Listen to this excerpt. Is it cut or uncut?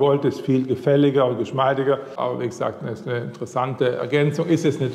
cut